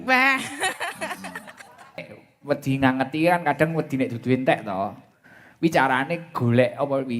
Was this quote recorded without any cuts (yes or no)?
no